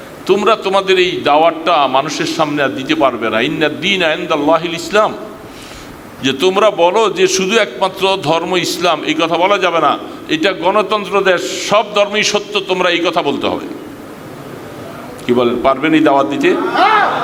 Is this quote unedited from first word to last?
yes; 0 cuts

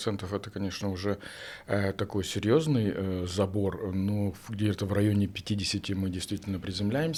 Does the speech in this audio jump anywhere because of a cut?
no; 0 cuts

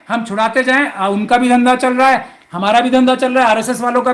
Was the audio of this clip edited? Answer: no; 0 cuts

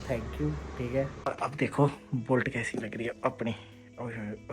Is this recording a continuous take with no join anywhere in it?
no; 1 cut; at 1.2 s

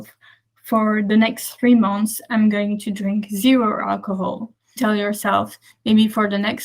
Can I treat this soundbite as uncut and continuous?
no; 1 cut; at 4.6 s

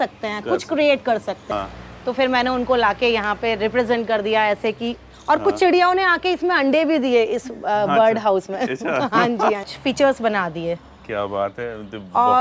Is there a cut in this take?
yes; 2 cuts; at 1.4 s, 9.7 s

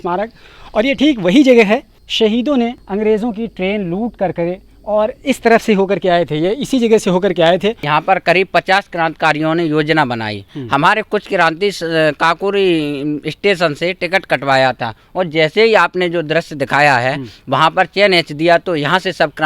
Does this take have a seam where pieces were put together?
yes; 3 cuts; at 2.0 s, 2.8 s, 7.8 s

